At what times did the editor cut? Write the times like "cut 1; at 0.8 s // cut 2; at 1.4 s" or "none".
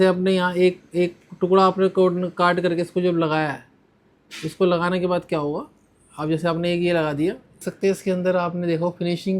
cut 1; at 7.7 s